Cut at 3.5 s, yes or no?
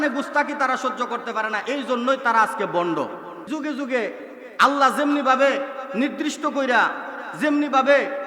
yes